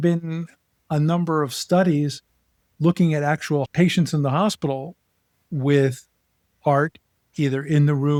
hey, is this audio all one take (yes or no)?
yes